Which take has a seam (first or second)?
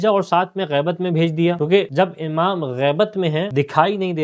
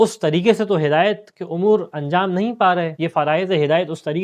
first